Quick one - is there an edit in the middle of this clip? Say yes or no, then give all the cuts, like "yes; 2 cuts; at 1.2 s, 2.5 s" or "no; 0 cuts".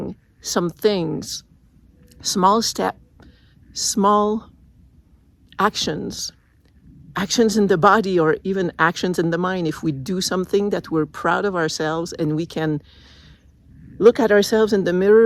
no; 0 cuts